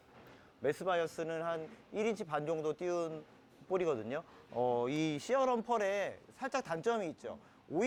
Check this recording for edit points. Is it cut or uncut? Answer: uncut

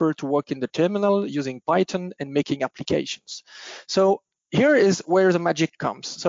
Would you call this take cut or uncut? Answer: uncut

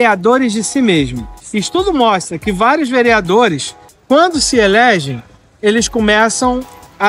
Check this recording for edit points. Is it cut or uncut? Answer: uncut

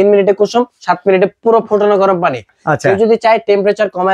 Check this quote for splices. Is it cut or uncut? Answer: cut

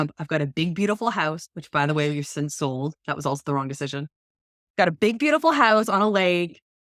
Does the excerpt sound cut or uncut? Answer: uncut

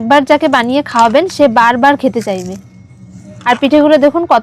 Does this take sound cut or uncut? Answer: cut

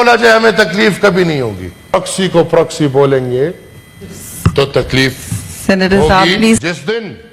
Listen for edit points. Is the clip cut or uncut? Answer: cut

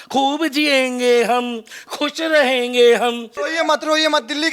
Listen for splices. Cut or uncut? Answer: cut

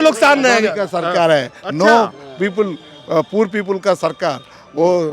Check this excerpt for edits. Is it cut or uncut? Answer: uncut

